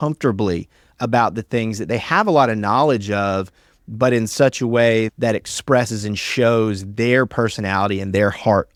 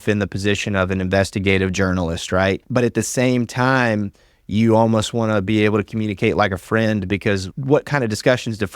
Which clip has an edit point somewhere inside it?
second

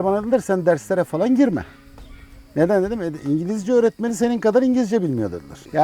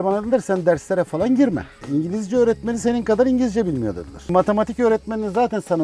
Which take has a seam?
second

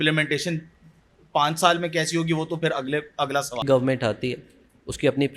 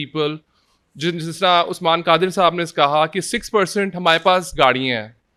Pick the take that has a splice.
first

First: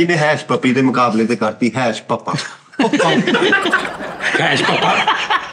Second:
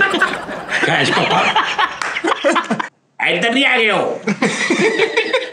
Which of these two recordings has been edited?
second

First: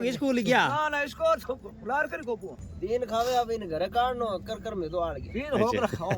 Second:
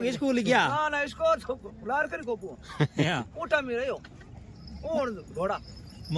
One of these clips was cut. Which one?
first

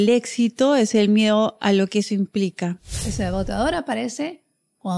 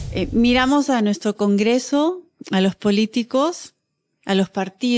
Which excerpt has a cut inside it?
first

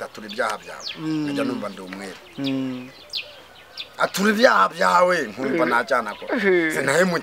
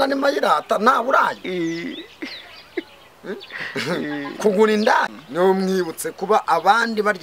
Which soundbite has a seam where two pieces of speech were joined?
second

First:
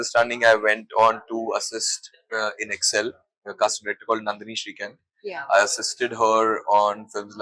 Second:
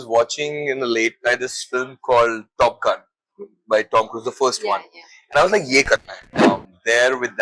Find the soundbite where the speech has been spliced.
second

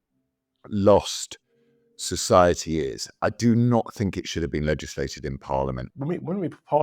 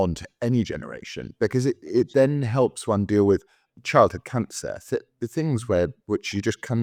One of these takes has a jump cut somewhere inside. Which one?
first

